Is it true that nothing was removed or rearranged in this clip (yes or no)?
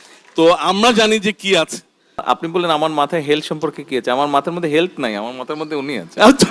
no